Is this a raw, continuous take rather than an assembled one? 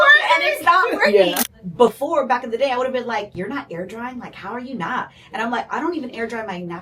no; 1 cut; at 1.5 s

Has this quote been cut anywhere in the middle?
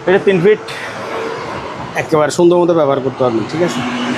no; 0 cuts

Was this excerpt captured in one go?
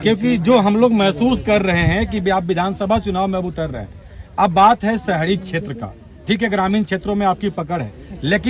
yes; 0 cuts

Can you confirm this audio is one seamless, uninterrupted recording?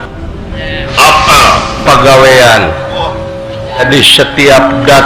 no; 1 cut; at 3.8 s

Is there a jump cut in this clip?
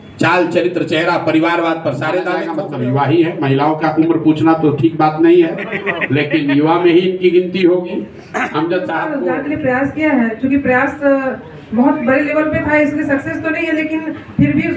yes; 2 cuts; at 2.5 s, 9.2 s

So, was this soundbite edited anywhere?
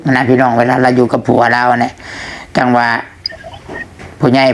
no; 0 cuts

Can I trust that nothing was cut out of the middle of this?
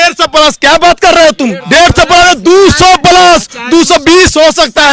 yes; 0 cuts

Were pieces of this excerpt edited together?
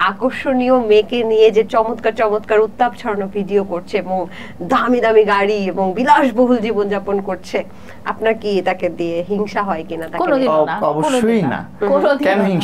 no; 0 cuts

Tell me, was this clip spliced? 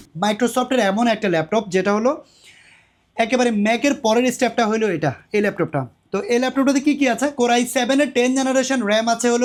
no; 0 cuts

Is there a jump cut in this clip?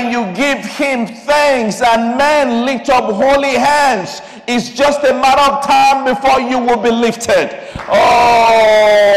no; 0 cuts

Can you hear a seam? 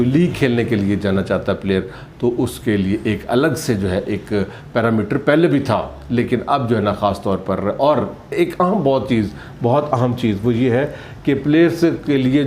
no; 0 cuts

